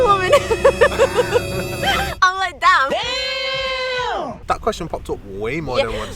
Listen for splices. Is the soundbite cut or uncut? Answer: uncut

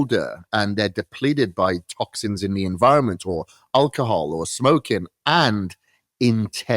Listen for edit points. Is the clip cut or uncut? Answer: uncut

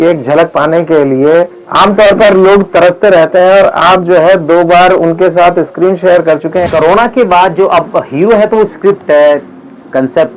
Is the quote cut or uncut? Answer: cut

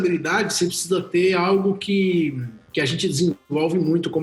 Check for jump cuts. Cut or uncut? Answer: uncut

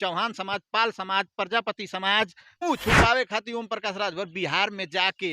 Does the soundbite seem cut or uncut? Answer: cut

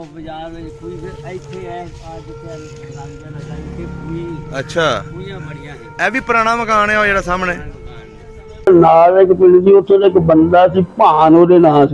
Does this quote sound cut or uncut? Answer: cut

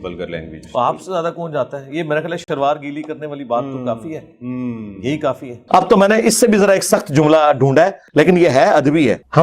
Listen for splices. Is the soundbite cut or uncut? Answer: cut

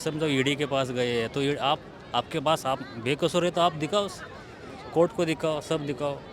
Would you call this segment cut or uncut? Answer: uncut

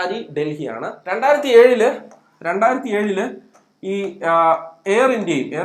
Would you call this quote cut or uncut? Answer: cut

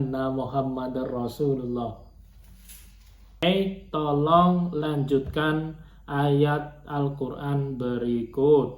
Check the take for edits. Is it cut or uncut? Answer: cut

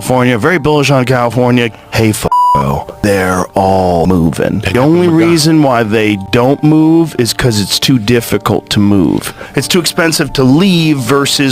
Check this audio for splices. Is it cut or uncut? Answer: uncut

